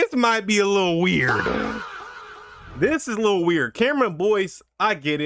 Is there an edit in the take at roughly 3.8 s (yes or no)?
no